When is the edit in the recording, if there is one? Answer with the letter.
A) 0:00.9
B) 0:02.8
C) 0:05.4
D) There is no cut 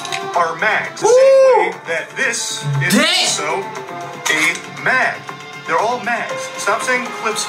A